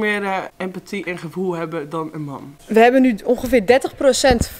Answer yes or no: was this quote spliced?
yes